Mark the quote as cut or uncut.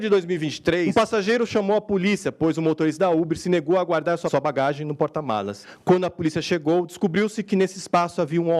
cut